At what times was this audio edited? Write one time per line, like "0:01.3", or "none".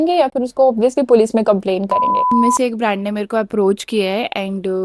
0:02.3

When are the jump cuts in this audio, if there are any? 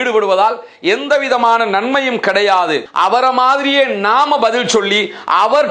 0:02.8

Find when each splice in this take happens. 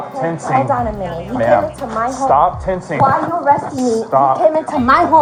none

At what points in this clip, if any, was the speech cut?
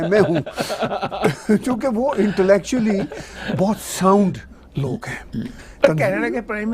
0:05.6

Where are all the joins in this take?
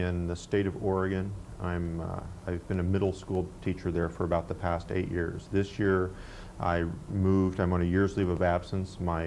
0:07.9

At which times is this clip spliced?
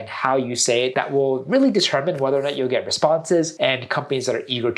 0:00.9
0:03.6

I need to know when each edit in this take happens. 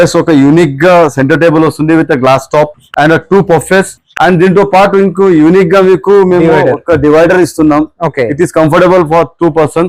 none

